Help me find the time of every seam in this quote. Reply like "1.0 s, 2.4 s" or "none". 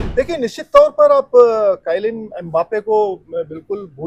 none